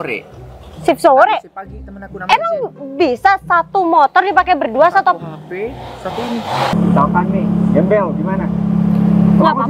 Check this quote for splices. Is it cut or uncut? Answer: cut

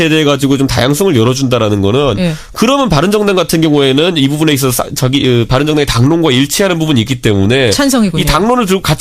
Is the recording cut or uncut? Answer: cut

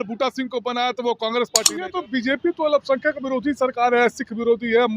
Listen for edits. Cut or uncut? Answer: cut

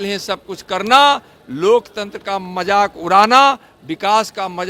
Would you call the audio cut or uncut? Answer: uncut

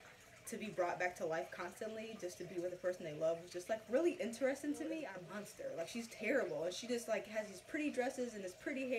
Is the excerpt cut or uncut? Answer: cut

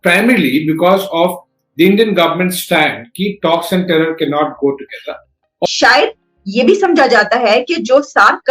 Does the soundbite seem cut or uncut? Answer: cut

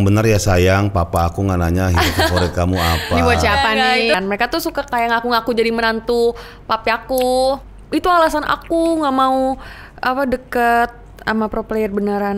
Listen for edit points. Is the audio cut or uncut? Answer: cut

